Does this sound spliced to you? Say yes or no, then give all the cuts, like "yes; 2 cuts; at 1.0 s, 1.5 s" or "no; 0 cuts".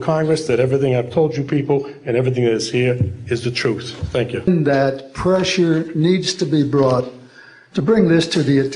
yes; 1 cut; at 4.5 s